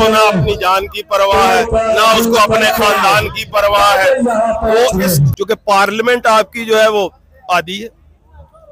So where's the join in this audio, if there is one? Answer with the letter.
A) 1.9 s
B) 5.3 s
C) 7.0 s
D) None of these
B